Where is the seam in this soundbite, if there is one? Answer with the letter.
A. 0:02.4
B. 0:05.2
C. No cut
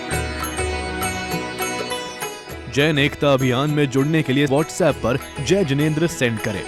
A